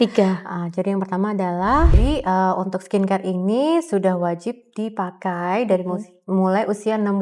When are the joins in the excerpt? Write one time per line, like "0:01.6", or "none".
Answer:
0:02.0